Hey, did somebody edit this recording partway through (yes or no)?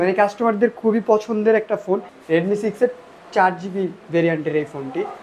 yes